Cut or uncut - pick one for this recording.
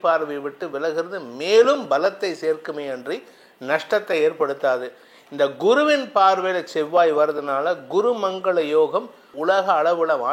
cut